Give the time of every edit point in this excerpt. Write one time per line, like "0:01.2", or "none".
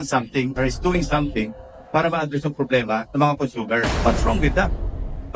0:03.9